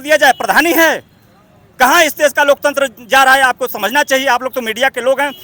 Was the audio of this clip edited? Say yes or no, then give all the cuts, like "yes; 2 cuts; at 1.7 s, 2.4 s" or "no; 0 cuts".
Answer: no; 0 cuts